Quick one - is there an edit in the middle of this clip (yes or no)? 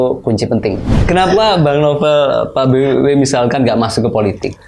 yes